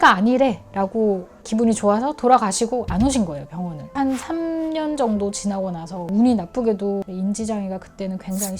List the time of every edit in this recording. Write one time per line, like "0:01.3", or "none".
0:06.1